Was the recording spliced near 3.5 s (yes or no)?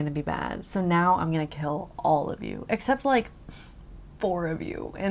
no